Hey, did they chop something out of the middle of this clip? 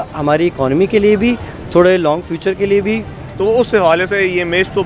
yes; 1 cut; at 3.2 s

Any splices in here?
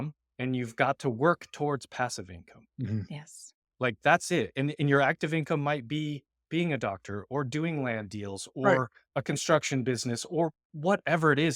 no; 0 cuts

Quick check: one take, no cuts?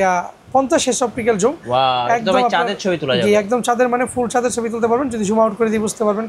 yes; 0 cuts

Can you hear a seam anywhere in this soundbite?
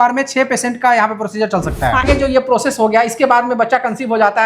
yes; 1 cut; at 2.1 s

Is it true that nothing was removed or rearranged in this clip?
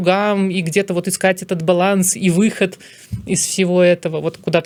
yes; 0 cuts

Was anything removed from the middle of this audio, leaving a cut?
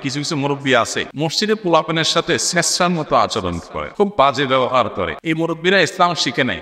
yes; 3 cuts; at 1.0 s, 3.8 s, 5.1 s

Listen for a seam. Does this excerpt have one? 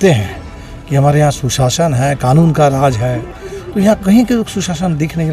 no; 0 cuts

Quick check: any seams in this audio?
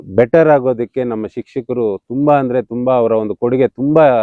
no; 0 cuts

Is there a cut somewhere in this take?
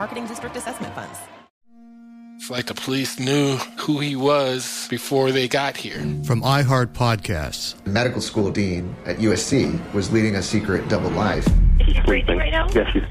yes; 1 cut; at 1.4 s

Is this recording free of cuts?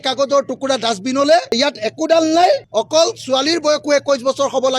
no; 1 cut; at 2.7 s

